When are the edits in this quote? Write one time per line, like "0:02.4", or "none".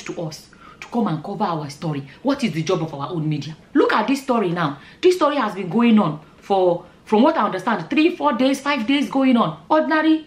0:03.6

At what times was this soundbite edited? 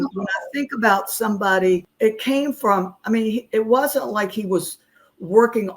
0:01.9

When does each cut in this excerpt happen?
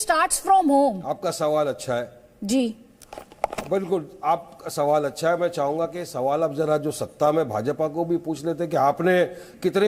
none

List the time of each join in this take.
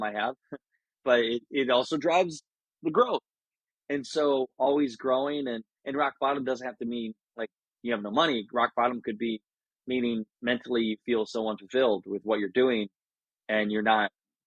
none

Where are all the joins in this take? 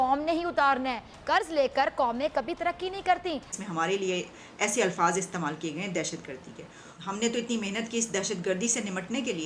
0:03.6

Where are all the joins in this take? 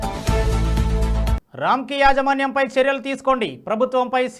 0:01.0

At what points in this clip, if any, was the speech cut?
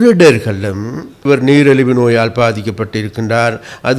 0:01.2

